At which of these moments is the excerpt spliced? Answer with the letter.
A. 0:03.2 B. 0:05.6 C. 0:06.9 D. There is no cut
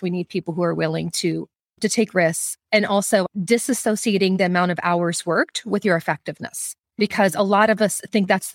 A